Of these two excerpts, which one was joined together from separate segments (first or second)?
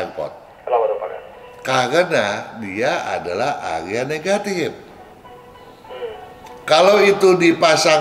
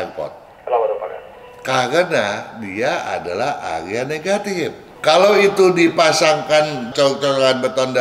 second